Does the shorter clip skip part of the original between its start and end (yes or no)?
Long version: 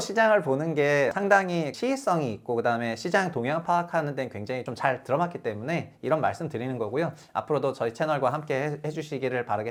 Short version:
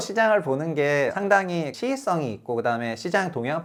no